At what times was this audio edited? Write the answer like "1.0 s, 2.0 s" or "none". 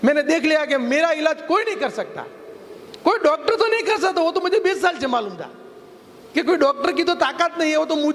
none